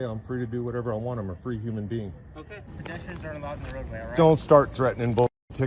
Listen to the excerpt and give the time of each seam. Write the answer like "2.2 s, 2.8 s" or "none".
2.7 s